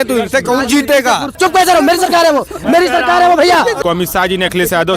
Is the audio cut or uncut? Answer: cut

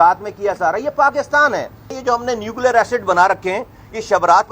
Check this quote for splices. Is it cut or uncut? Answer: cut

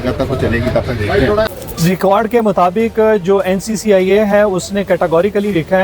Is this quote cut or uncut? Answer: cut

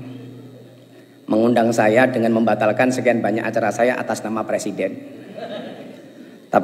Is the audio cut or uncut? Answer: uncut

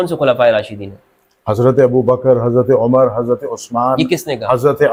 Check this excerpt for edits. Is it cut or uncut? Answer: uncut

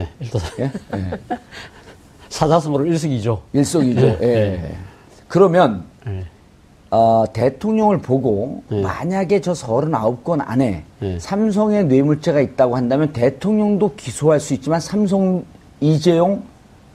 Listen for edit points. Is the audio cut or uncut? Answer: uncut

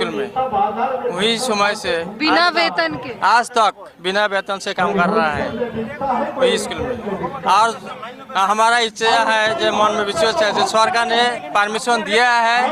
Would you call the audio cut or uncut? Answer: uncut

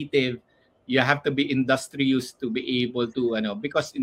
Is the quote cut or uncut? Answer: uncut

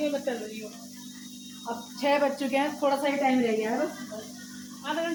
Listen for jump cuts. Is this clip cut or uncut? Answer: uncut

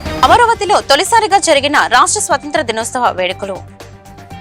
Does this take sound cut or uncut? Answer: uncut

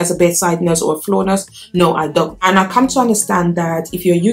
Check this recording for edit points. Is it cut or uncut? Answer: cut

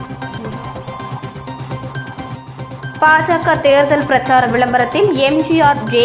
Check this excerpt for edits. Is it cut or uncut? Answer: uncut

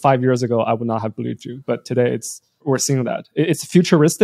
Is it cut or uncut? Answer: cut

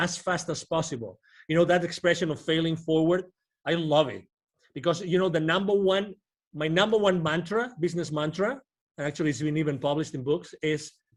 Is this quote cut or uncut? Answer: uncut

